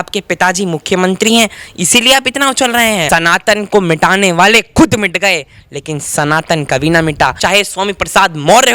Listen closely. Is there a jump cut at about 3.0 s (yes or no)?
yes